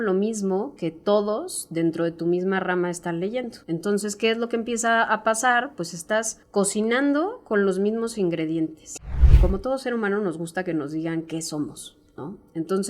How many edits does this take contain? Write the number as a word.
three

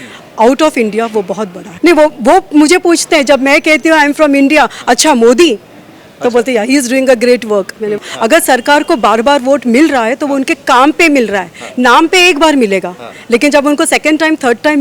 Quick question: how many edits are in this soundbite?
two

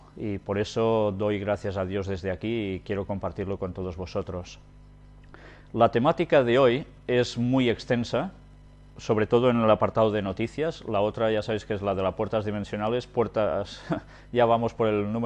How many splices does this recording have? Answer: one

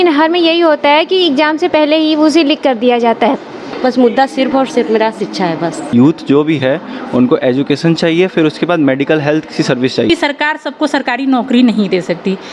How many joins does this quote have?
three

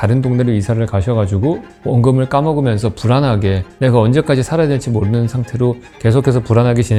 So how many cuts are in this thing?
zero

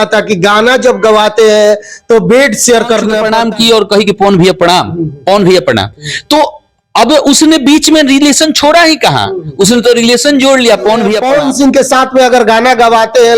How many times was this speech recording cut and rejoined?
two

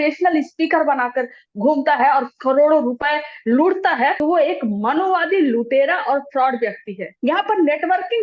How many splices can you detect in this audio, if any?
two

